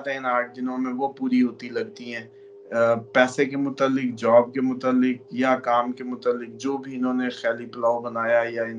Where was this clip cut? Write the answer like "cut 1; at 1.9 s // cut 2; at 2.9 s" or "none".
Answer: none